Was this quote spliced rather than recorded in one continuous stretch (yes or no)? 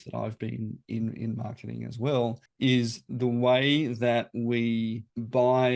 no